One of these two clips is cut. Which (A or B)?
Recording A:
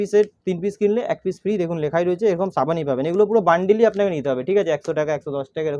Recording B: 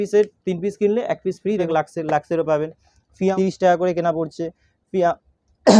B